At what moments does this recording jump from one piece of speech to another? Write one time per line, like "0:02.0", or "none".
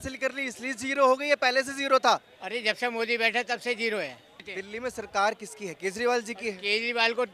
0:04.6